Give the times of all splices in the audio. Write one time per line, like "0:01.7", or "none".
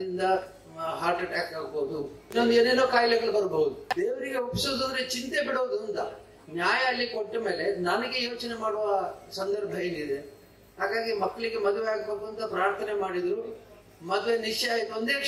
0:02.3
0:03.8